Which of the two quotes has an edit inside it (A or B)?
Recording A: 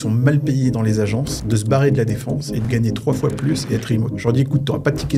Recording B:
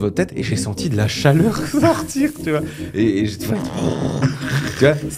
A